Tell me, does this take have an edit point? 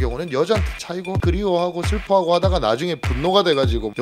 yes; 1 cut; at 1.2 s

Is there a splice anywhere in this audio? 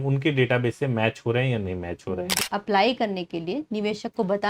yes; 1 cut; at 2.4 s

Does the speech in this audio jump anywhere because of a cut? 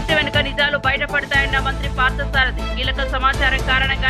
no; 0 cuts

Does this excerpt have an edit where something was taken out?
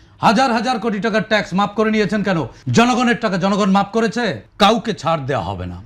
yes; 2 cuts; at 2.6 s, 4.4 s

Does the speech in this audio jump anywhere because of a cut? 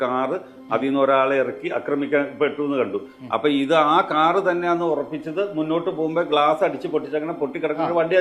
no; 0 cuts

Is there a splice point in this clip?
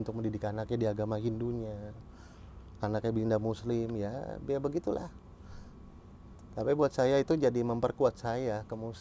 no; 0 cuts

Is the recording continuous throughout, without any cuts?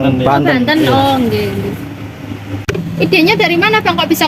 no; 1 cut; at 2.6 s

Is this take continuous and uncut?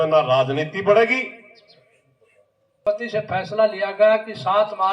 no; 1 cut; at 2.9 s

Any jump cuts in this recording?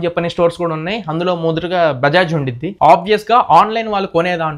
yes; 1 cut; at 2.7 s

